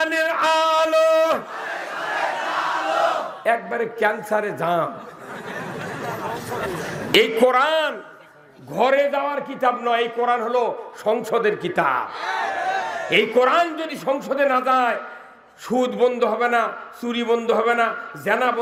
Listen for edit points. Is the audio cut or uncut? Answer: uncut